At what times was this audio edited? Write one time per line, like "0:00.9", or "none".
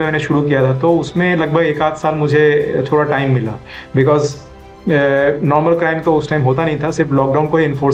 none

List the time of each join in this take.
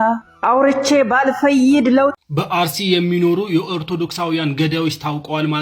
0:02.2

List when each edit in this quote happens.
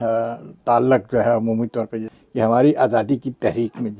0:02.1

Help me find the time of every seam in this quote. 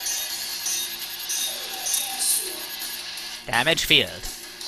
0:01.4

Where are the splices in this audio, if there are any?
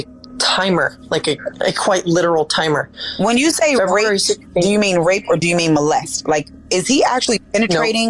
none

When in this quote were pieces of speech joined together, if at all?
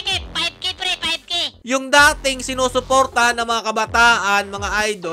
0:01.6

